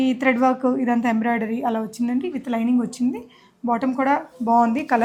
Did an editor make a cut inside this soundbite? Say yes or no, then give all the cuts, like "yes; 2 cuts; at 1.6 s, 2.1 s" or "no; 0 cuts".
no; 0 cuts